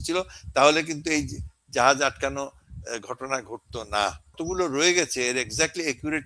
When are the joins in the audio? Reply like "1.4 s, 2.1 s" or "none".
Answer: 4.4 s